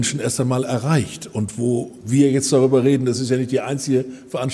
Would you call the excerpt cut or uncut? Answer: uncut